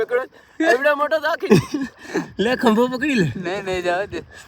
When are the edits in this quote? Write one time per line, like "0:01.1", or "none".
0:01.5